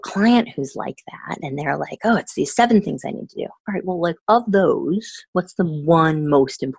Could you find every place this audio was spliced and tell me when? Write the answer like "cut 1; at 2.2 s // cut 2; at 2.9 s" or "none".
none

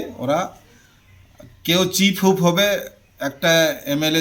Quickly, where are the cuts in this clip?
none

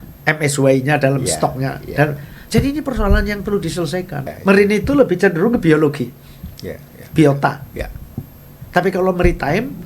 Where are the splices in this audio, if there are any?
cut 1; at 4.3 s

